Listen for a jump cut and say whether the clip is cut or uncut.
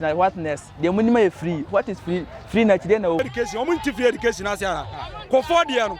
cut